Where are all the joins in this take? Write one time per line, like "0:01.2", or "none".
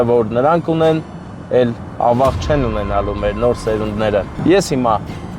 0:04.3